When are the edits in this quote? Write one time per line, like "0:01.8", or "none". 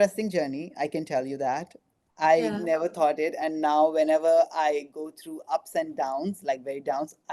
none